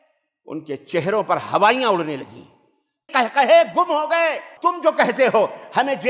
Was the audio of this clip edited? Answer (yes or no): yes